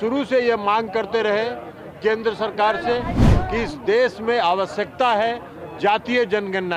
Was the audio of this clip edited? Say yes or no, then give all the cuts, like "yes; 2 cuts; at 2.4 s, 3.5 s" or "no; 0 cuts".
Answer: no; 0 cuts